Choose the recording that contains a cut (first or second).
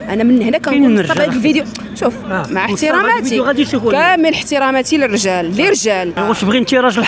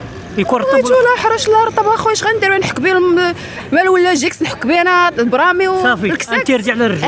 first